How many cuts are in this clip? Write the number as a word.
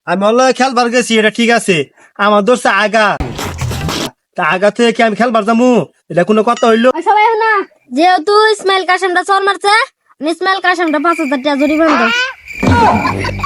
one